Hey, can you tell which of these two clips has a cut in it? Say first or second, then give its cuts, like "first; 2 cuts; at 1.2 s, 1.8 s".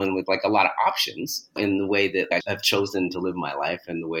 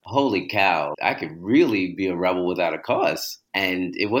second; 2 cuts; at 0.9 s, 3.3 s